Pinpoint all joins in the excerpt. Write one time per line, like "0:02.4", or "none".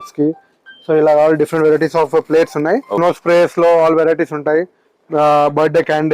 0:02.9